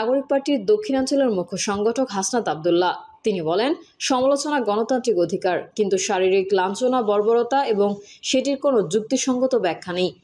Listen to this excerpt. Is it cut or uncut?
uncut